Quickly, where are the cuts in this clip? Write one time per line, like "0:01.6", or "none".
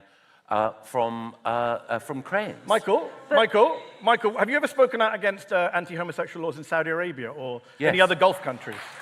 none